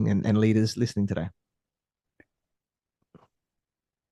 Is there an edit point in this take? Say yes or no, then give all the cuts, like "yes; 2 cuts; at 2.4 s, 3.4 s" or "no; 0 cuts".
no; 0 cuts